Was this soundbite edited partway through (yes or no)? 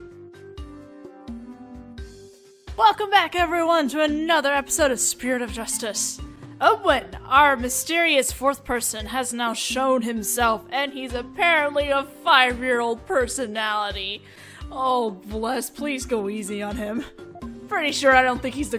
no